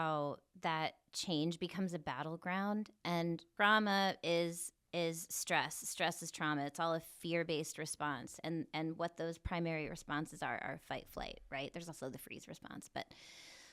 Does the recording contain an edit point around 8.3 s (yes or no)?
no